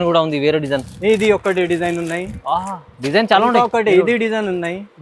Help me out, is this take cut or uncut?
uncut